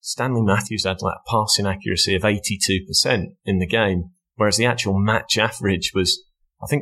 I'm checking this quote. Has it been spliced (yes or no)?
no